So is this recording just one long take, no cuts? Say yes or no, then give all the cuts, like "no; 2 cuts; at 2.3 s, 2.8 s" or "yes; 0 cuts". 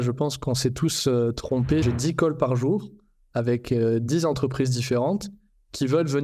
no; 1 cut; at 1.8 s